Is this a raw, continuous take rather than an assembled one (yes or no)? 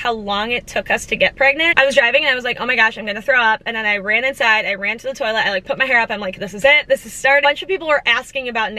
no